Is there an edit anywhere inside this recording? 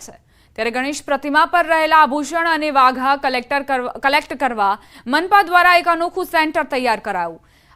yes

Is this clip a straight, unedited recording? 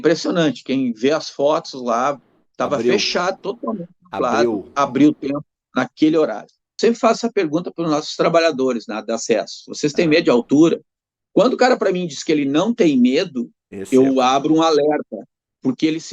no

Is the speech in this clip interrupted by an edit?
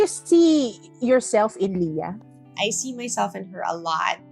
yes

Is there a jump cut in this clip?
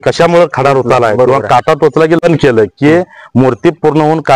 yes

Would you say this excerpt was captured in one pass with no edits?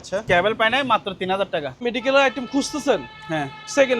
no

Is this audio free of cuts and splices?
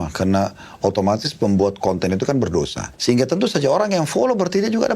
no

